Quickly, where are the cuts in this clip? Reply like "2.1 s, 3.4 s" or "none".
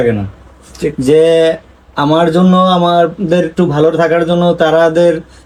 none